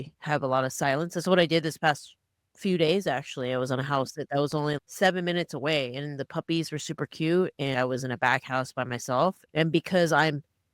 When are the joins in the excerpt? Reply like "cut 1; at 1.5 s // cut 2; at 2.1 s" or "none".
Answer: cut 1; at 4.9 s // cut 2; at 7.7 s

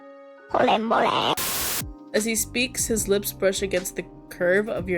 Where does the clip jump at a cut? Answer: cut 1; at 1.4 s

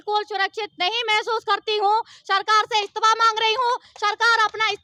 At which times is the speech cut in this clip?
none

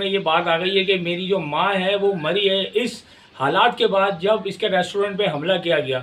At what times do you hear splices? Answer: none

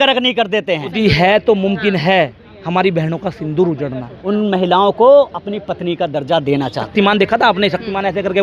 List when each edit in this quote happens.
cut 1; at 0.9 s // cut 2; at 4.2 s // cut 3; at 6.8 s

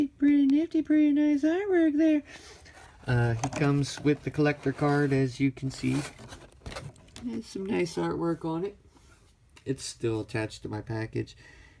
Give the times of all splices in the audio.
cut 1; at 2.2 s

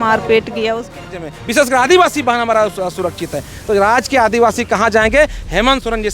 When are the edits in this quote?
cut 1; at 1.0 s

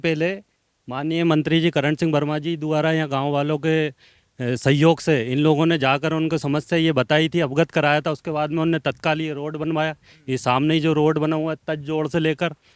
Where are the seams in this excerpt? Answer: none

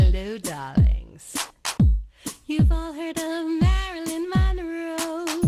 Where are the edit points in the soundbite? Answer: cut 1; at 1.4 s

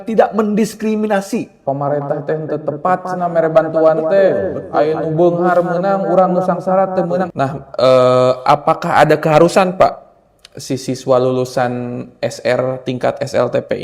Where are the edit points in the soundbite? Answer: cut 1; at 1.6 s // cut 2; at 7.3 s

